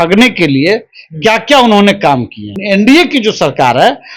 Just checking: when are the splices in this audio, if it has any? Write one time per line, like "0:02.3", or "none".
0:02.5